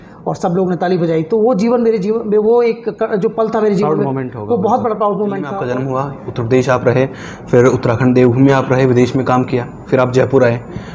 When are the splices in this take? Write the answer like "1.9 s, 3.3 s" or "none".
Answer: 5.6 s